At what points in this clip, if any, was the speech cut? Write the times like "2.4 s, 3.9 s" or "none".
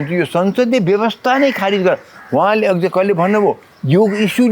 none